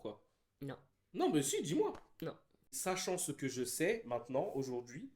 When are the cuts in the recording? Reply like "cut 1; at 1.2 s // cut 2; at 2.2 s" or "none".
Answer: cut 1; at 2.8 s